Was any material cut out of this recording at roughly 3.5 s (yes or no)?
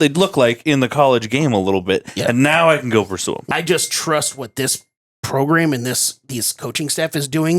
yes